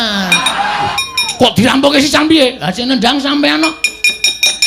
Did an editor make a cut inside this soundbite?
yes; 1 cut; at 0.9 s

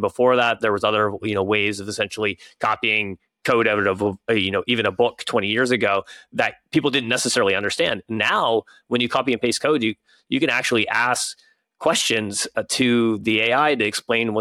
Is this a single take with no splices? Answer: yes; 0 cuts

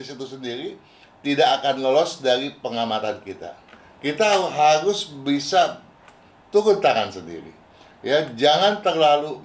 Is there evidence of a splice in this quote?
yes; 1 cut; at 3.8 s

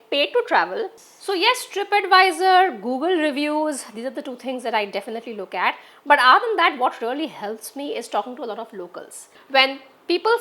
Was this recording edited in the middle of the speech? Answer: yes; 2 cuts; at 1.0 s, 9.4 s

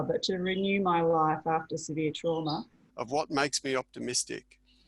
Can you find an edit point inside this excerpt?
yes; 1 cut; at 2.8 s

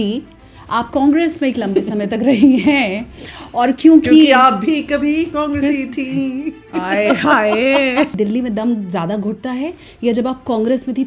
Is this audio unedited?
no; 1 cut; at 8.1 s

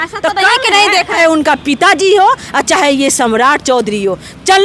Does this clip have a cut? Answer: yes; 1 cut; at 1.2 s

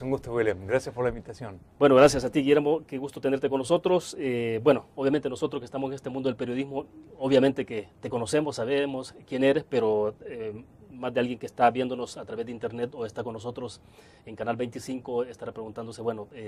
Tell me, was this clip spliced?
no; 0 cuts

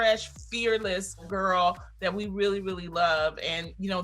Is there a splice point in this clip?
yes; 1 cut; at 1.3 s

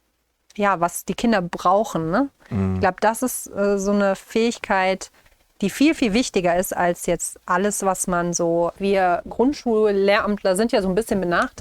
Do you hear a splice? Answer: yes; 1 cut; at 8.7 s

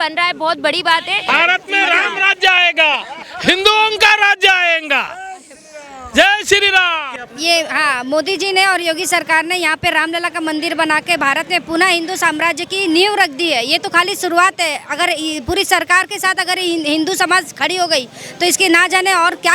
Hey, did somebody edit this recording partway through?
yes; 2 cuts; at 1.3 s, 7.1 s

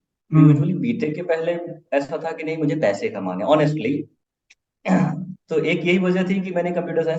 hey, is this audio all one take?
yes; 0 cuts

